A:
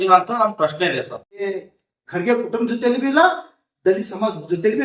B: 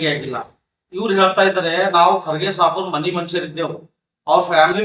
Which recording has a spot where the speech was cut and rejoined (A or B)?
A